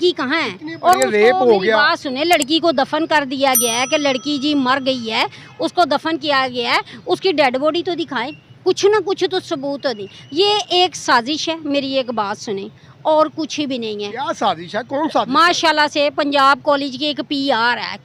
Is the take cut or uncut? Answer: uncut